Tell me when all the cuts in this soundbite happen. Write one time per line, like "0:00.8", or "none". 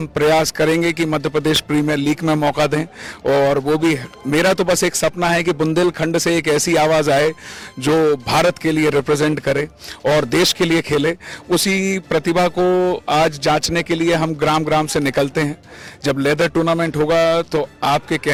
none

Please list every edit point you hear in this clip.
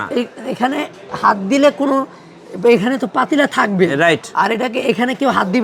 none

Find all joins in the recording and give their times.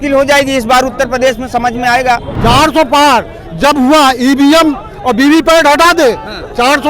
0:02.3

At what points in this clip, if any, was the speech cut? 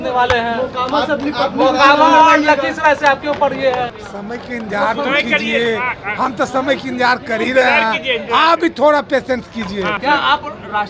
0:04.0
0:10.0

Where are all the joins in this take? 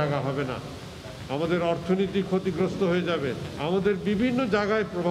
none

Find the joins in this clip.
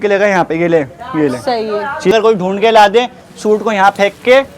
0:02.1

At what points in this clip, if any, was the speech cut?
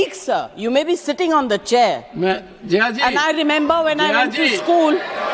none

